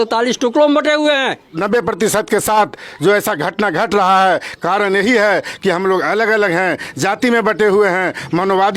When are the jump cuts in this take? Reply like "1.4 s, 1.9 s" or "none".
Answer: 1.5 s